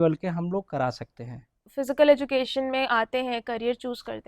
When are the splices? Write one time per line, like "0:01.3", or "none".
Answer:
0:01.7